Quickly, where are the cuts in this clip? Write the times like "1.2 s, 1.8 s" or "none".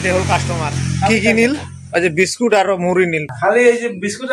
3.3 s